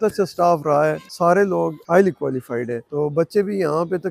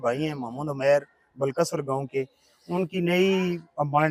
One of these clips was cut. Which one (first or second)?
first